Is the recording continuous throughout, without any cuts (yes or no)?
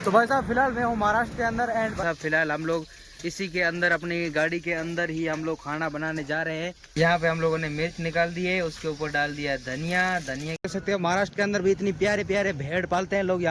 no